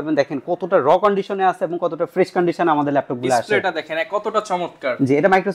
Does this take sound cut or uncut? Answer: uncut